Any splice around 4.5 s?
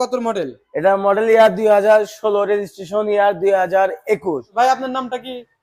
yes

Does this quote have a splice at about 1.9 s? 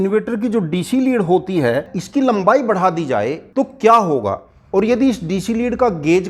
yes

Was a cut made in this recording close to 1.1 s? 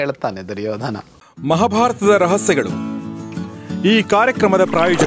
yes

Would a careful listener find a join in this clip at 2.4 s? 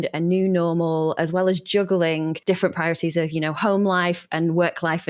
yes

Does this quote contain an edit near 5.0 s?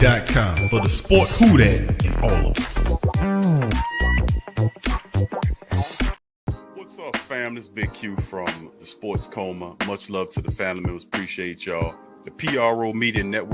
no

